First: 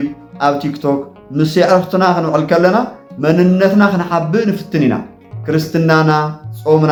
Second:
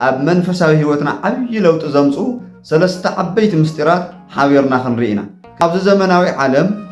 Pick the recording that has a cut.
second; 1 cut; at 5.6 s

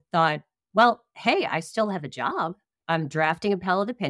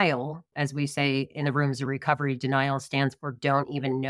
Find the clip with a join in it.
first; 1 cut; at 2.7 s

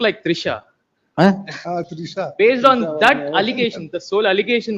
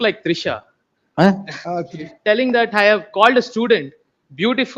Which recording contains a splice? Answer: second; 1 cut; at 2.1 s

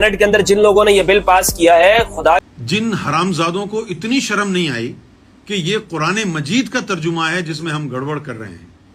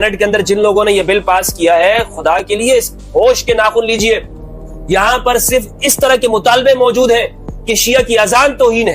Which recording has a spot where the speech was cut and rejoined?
first; 1 cut; at 2.4 s

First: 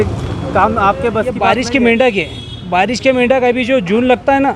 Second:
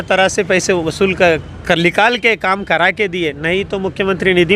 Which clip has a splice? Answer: first; 1 cut; at 1.4 s

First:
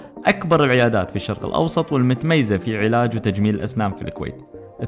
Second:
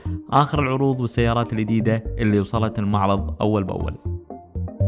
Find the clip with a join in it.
second; 1 cut; at 4.0 s

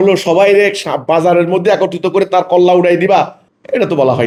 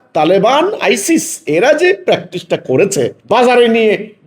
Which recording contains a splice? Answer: second; 1 cut; at 3.2 s

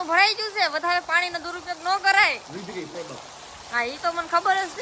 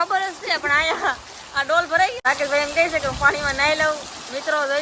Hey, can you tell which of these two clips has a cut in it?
second; 1 cut; at 2.2 s

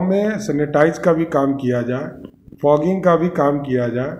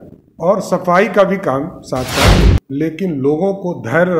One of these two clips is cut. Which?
second; 1 cut; at 2.5 s

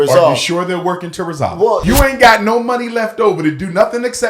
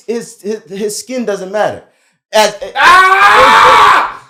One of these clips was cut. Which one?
first; 1 cut; at 1.8 s

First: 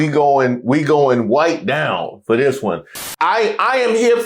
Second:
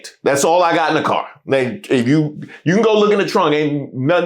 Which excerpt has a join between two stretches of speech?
first; 1 cut; at 3.0 s

